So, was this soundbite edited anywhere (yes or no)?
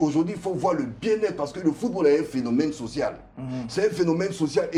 no